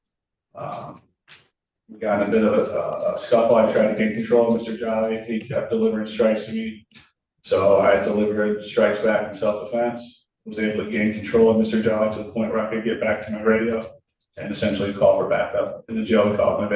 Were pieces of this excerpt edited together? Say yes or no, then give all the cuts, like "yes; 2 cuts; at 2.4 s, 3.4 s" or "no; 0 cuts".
no; 0 cuts